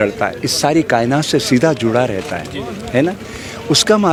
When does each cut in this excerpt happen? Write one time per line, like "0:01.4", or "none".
none

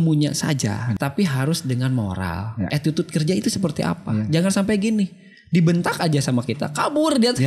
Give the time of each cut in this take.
0:00.9
0:02.7

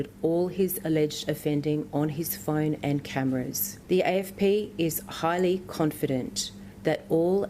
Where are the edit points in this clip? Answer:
0:03.7

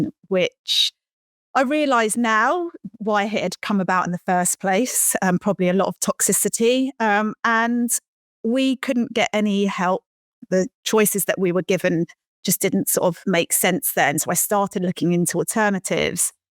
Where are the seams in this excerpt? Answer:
0:10.4

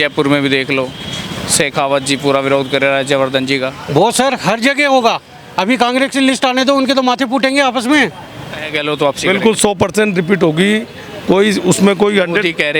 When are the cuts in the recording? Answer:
0:08.6

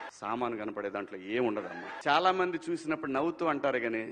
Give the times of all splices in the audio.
0:01.6

